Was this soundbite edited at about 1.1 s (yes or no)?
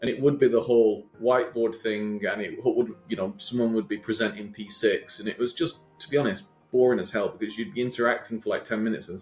yes